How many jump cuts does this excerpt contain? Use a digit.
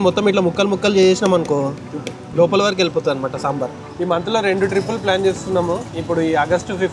2